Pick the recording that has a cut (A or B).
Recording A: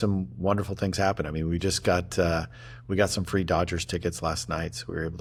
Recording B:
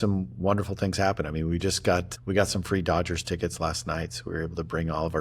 B